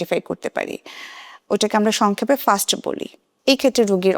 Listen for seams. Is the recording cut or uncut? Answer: cut